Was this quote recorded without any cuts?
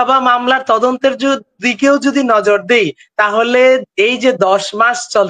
yes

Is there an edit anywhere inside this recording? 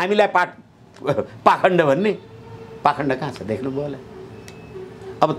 no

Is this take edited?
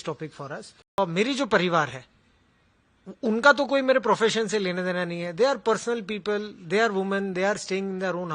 yes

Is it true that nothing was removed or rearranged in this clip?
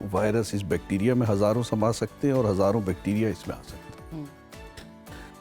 yes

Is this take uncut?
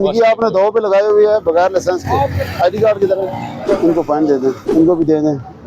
no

